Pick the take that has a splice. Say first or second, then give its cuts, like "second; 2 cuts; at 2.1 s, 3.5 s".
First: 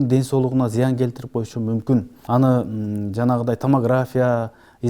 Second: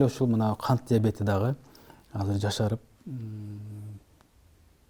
first; 1 cut; at 2.1 s